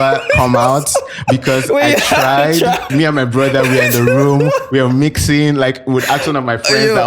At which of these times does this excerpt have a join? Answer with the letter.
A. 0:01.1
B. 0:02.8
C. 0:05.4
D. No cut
B